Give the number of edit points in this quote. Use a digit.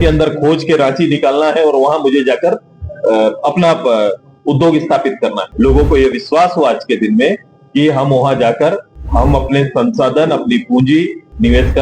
1